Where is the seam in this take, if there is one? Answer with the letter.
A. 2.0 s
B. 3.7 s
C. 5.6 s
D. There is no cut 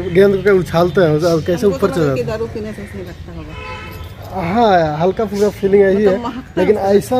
D